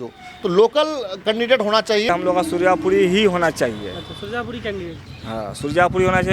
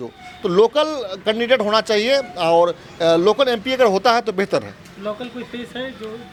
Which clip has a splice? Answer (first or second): first